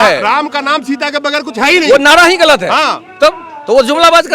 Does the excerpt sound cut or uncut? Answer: uncut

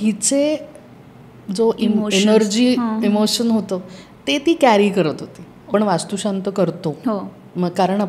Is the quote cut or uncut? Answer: cut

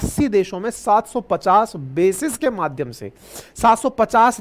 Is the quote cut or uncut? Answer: uncut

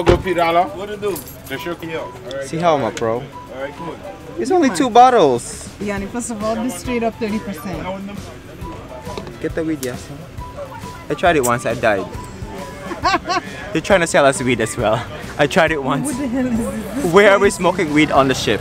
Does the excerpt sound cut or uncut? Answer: uncut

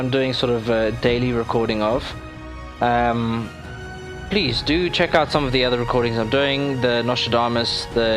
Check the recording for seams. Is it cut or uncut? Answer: cut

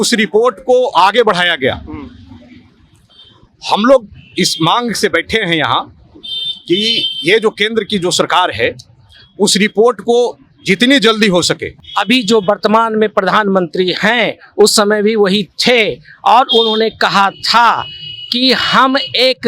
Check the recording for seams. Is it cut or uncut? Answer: cut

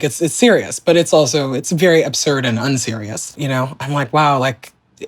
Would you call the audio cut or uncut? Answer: cut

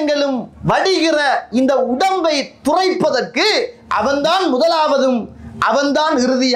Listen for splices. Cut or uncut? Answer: cut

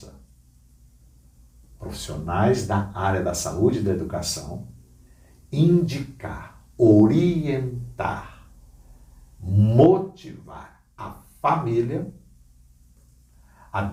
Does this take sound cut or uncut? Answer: uncut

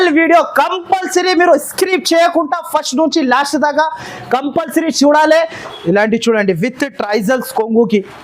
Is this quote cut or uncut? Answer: cut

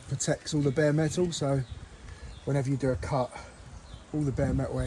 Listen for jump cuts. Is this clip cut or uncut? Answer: uncut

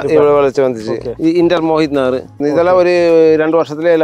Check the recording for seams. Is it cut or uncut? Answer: cut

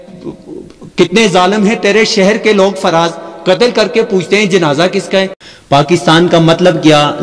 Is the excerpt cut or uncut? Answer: cut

